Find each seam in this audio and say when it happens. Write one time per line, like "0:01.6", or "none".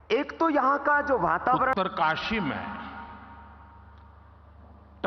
0:01.7